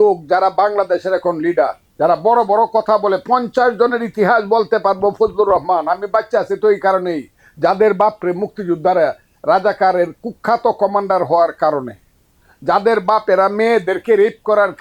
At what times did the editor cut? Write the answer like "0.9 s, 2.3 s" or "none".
1.8 s